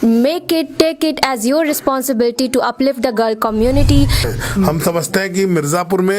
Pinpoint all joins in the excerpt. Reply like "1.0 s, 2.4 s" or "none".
4.2 s